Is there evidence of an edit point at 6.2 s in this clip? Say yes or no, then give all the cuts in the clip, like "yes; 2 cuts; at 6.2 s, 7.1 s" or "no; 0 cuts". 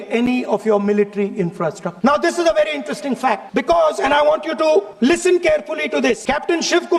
yes; 4 cuts; at 1.9 s, 3.4 s, 4.9 s, 6.2 s